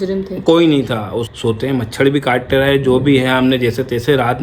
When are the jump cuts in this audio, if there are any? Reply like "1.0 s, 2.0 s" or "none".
1.2 s